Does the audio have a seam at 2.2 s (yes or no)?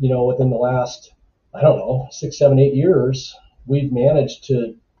no